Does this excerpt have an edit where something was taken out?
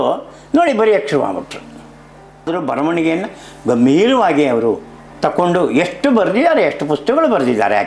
yes; 1 cut; at 2.5 s

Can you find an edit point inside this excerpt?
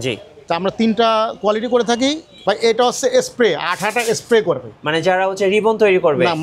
yes; 1 cut; at 2.3 s

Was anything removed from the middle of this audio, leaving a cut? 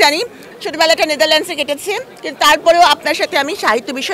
no; 0 cuts

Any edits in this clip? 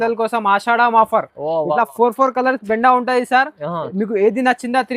no; 0 cuts

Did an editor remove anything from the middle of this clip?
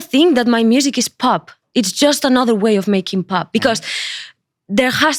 no; 0 cuts

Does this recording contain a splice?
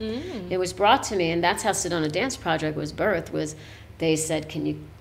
no; 0 cuts

